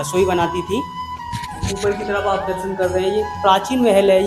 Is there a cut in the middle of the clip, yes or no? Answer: no